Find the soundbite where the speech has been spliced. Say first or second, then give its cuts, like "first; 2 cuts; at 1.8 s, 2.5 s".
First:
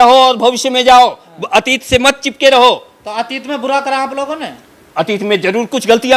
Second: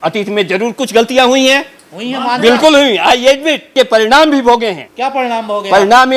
second; 2 cuts; at 3.7 s, 4.9 s